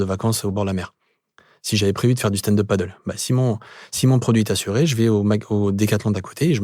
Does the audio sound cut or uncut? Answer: uncut